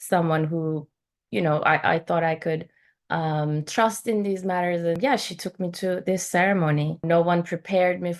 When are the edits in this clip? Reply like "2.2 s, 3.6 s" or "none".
5.0 s, 7.0 s